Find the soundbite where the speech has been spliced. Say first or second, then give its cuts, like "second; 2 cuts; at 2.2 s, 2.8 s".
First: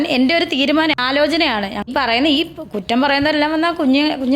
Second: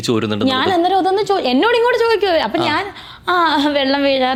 first; 1 cut; at 1.9 s